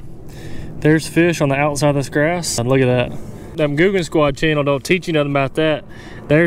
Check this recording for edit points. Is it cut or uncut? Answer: cut